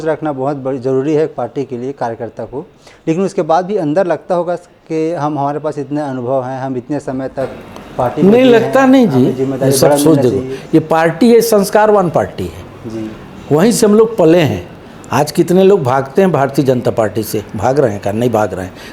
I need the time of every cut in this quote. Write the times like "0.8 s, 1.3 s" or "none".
none